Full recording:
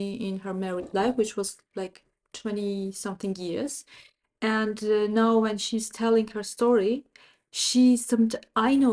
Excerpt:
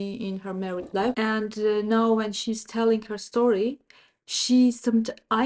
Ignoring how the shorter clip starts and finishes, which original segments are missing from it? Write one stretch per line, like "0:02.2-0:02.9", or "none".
0:01.1-0:04.4